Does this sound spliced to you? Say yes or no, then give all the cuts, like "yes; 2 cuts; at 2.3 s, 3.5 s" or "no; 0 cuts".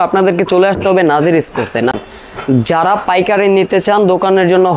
yes; 1 cut; at 1.9 s